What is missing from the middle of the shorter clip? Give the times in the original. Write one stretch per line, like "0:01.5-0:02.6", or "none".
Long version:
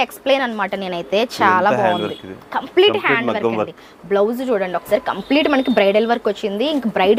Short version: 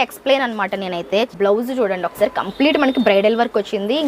0:01.3-0:04.0